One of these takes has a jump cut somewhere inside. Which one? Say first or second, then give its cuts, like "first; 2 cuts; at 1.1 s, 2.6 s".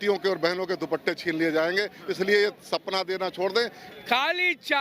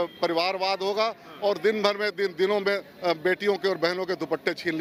first; 1 cut; at 3.8 s